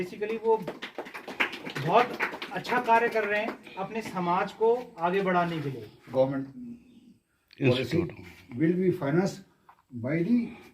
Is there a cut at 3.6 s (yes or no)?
no